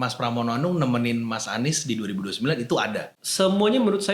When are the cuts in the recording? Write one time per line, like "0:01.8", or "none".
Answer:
0:03.2

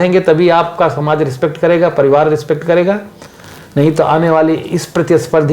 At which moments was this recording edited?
none

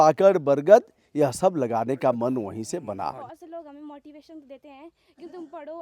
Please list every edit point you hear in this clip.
0:03.3

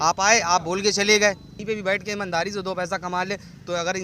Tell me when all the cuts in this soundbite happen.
0:01.5

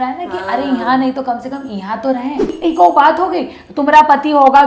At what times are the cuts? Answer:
0:02.6

